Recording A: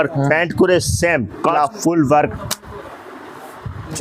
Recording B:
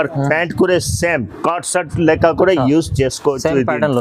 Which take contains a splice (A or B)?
A